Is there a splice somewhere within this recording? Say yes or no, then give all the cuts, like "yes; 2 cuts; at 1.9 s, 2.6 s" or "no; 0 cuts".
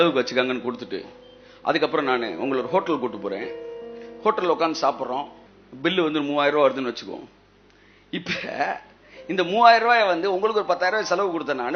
yes; 1 cut; at 5.4 s